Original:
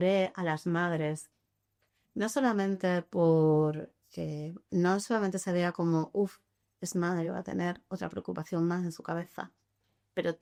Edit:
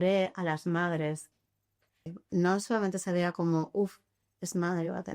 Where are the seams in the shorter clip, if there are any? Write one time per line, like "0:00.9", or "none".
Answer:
0:02.0